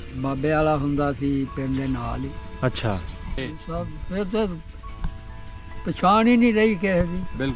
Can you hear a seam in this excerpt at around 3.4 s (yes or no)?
yes